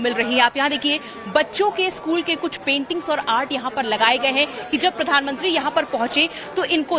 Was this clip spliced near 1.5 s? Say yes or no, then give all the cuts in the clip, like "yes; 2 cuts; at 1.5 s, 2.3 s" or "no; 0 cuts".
no; 1 cut; at 5.1 s